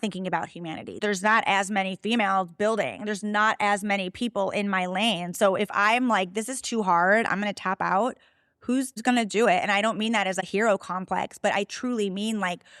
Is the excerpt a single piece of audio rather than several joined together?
no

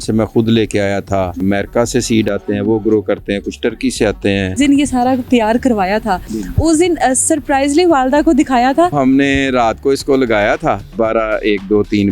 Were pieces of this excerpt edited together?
yes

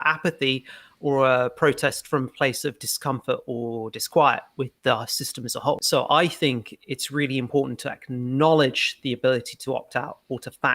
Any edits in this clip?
yes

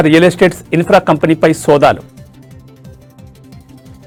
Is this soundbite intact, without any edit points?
yes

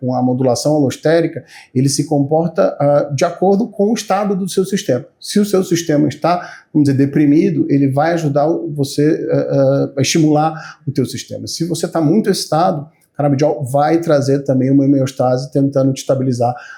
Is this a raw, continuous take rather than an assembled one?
yes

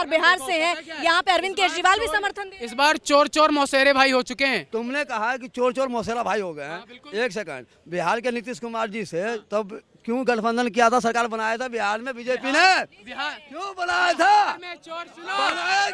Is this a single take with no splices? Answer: no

